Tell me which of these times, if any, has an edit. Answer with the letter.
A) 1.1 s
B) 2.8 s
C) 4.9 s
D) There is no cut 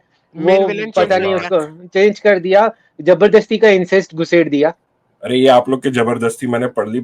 C